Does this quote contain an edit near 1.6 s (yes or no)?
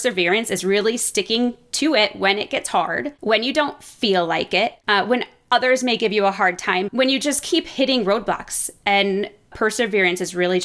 no